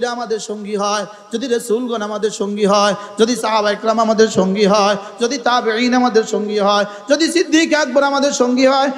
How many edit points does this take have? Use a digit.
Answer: 0